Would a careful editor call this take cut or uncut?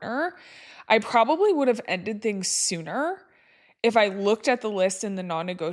uncut